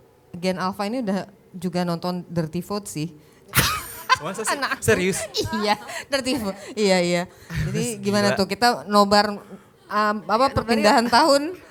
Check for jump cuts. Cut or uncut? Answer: uncut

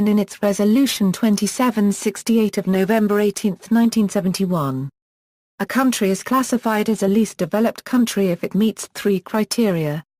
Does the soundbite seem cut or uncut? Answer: cut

